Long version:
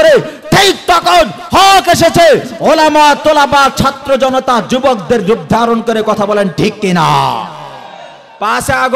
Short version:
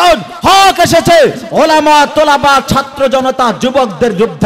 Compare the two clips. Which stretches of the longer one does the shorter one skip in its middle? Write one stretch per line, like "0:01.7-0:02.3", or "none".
none